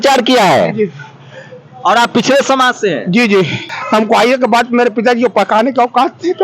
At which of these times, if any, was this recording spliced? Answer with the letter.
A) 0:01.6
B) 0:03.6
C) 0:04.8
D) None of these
B